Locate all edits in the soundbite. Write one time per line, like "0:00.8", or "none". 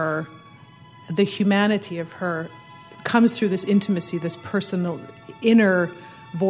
0:02.9